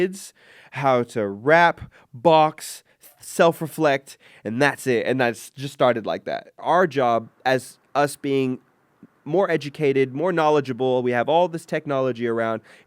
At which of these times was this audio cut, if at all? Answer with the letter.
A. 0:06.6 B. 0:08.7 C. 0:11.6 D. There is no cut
A